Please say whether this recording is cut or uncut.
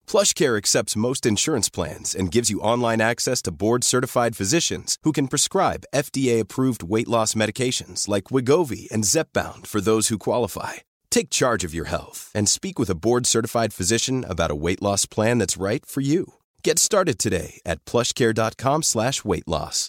uncut